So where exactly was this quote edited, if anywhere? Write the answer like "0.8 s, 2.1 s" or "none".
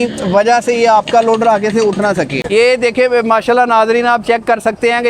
2.4 s